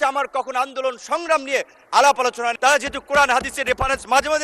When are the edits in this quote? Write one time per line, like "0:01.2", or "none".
0:02.6